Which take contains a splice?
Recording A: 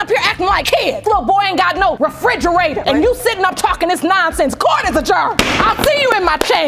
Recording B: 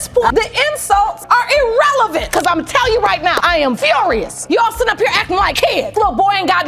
B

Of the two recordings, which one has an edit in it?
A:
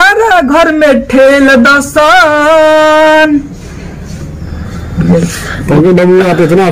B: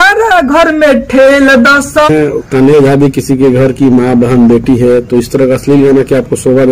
B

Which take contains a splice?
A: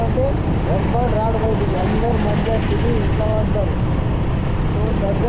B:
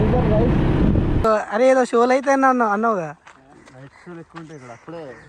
B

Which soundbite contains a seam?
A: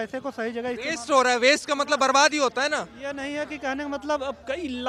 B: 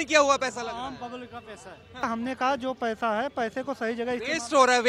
B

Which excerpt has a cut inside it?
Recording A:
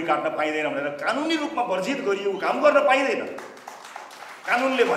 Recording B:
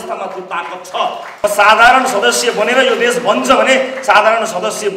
B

